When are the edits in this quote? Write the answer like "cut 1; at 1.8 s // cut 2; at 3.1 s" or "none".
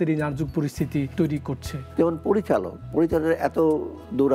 cut 1; at 1.5 s